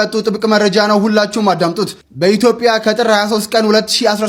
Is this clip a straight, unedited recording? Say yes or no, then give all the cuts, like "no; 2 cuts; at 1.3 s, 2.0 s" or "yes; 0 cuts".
yes; 0 cuts